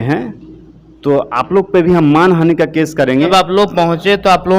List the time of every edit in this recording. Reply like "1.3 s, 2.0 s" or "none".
3.3 s